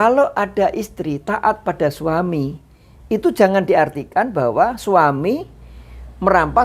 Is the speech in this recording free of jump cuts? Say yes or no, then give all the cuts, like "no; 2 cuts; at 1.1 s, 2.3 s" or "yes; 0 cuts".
yes; 0 cuts